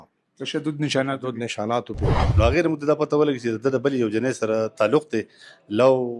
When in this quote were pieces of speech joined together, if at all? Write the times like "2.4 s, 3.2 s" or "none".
2.2 s